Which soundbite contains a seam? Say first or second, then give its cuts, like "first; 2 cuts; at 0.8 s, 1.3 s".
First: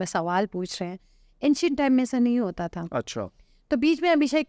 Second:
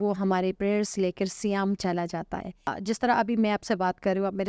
second; 1 cut; at 2.8 s